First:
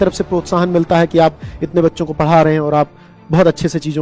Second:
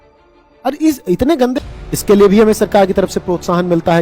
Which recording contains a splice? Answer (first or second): second